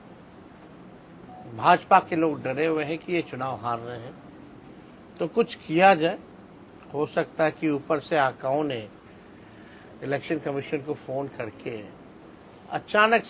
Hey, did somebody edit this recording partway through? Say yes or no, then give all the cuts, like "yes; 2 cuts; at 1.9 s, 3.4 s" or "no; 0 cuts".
no; 0 cuts